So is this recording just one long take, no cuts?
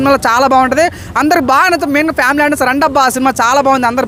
yes; 0 cuts

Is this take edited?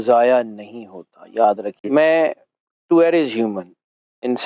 yes; 1 cut; at 1.7 s

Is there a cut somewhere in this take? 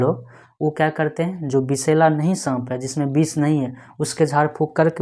no; 0 cuts

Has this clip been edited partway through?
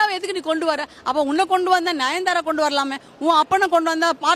no; 0 cuts

